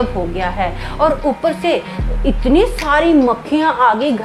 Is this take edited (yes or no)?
no